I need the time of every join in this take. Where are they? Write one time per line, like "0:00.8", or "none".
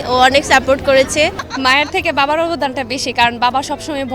0:01.4